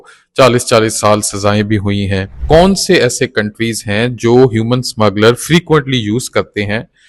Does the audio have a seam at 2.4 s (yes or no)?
yes